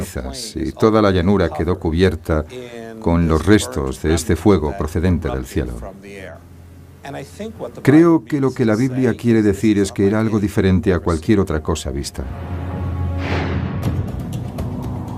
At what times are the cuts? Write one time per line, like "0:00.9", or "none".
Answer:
0:12.8